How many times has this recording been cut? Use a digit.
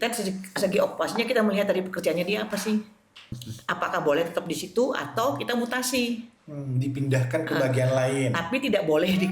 1